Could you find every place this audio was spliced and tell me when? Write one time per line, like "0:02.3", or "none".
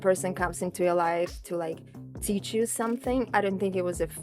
0:03.3